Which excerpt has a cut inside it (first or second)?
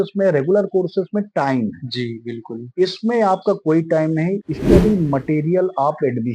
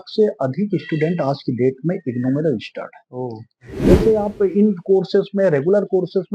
second